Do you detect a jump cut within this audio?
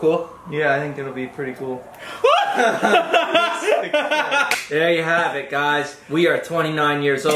no; 0 cuts

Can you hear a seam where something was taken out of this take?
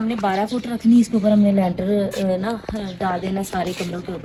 no; 0 cuts

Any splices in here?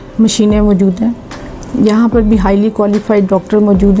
no; 0 cuts

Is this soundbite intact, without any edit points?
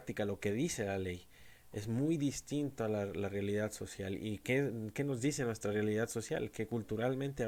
yes; 0 cuts

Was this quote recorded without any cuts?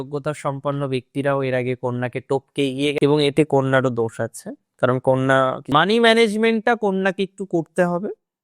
no; 1 cut; at 5.7 s

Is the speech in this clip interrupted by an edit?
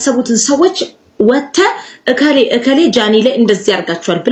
no; 0 cuts

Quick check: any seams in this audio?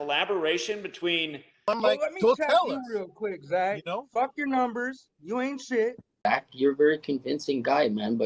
yes; 2 cuts; at 1.6 s, 6.2 s

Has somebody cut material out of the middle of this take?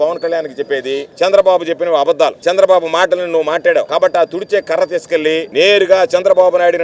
yes; 4 cuts; at 1.1 s, 2.4 s, 3.9 s, 5.5 s

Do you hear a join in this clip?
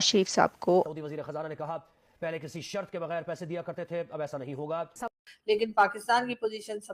yes; 2 cuts; at 0.8 s, 4.9 s

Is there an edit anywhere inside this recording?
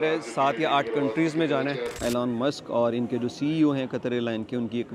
yes; 1 cut; at 2.0 s

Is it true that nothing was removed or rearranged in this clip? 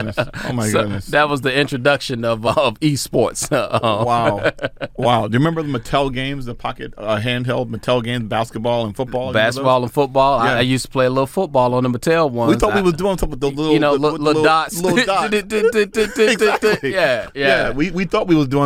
no; 1 cut; at 2.5 s

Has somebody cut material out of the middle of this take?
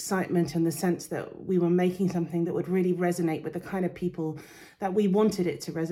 no; 0 cuts

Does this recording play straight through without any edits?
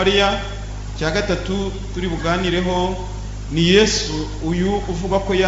yes; 0 cuts

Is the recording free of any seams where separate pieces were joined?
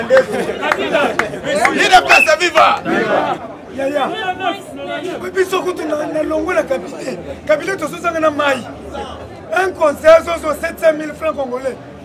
no; 1 cut; at 3.4 s

